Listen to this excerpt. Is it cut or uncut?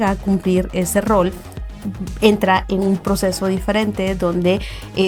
uncut